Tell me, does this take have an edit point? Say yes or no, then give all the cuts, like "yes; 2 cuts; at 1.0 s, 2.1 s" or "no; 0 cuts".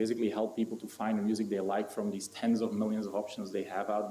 yes; 1 cut; at 2.8 s